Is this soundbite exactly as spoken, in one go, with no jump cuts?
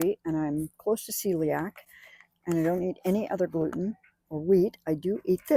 yes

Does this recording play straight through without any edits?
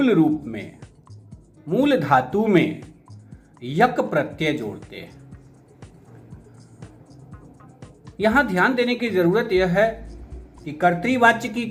yes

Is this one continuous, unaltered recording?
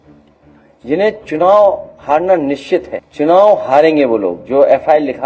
no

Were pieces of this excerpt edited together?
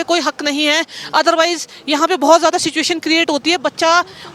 no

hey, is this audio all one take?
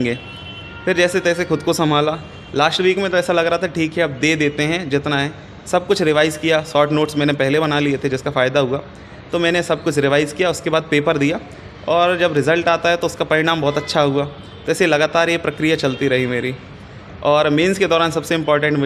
yes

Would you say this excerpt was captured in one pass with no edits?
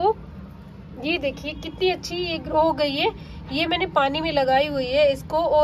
yes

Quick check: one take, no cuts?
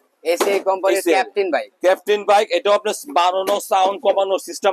yes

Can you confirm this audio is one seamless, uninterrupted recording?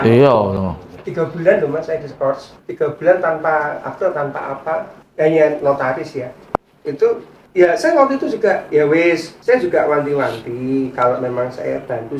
yes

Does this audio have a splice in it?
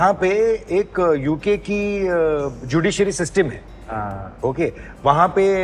no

